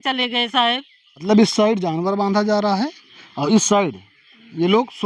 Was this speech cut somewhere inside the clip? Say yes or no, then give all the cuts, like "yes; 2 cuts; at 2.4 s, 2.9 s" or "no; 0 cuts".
yes; 1 cut; at 1.2 s